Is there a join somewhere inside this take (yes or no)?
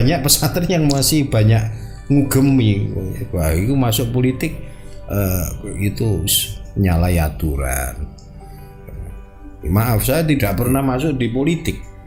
no